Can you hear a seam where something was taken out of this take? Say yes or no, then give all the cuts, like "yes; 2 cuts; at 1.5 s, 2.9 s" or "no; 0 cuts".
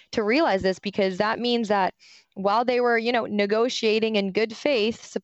no; 0 cuts